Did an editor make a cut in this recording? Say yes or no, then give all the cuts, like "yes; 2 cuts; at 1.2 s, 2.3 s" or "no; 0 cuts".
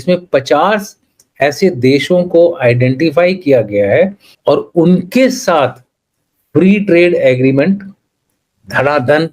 yes; 1 cut; at 4.3 s